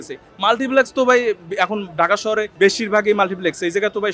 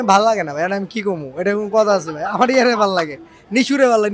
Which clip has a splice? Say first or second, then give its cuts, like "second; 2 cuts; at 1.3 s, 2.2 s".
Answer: first; 1 cut; at 2.5 s